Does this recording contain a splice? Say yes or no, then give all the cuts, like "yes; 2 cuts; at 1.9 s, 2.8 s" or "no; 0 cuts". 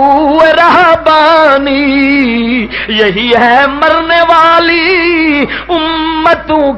no; 0 cuts